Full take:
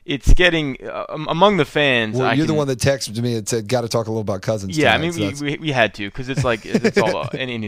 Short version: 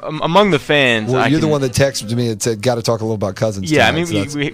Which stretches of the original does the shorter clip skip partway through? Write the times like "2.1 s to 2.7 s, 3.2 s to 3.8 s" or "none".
none